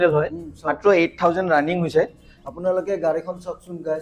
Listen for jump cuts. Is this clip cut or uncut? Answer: cut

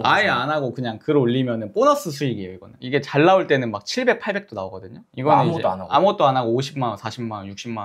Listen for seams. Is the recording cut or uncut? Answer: uncut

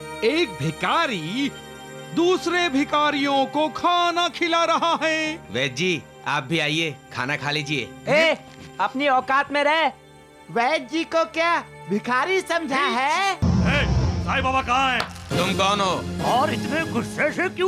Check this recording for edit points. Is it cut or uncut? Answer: cut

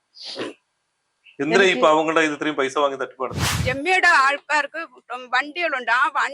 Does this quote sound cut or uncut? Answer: cut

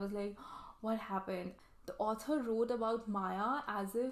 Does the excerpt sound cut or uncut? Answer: cut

